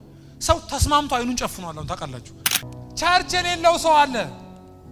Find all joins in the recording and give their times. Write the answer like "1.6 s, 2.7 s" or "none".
2.6 s